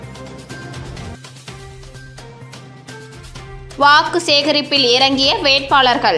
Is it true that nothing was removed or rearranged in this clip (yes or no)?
no